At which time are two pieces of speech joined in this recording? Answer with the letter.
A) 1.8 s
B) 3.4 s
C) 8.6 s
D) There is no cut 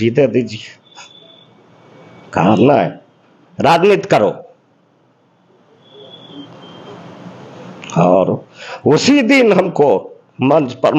D